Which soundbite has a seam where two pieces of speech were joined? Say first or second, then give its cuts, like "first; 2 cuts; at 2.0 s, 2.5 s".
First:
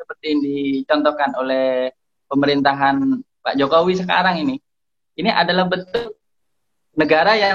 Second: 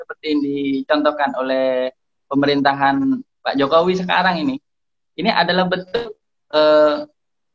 first; 1 cut; at 6.3 s